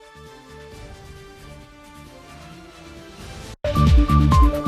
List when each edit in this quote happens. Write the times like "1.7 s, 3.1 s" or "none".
3.6 s